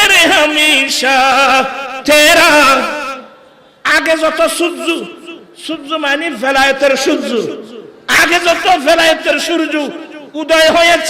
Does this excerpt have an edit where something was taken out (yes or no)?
no